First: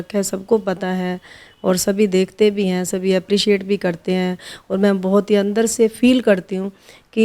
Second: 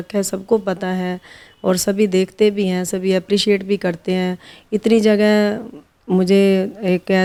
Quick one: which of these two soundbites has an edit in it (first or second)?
first